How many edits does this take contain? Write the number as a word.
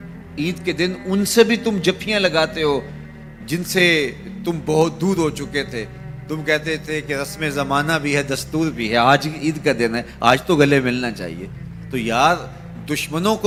zero